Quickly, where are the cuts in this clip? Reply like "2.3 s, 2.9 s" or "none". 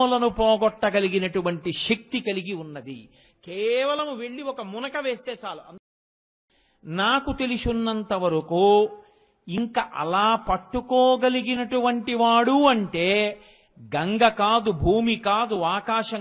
6.2 s

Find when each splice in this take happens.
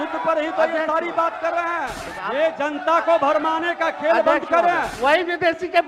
2.1 s, 4.9 s

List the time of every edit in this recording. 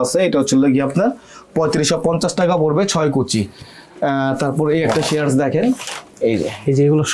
none

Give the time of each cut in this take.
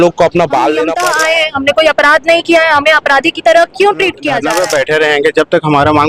0.9 s, 4.3 s

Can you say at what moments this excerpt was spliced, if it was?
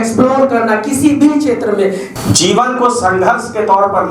2.1 s

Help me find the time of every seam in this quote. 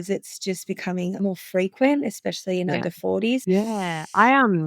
1.2 s, 3.4 s

